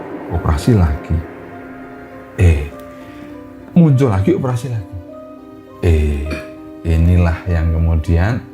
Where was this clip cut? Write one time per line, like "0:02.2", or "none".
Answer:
none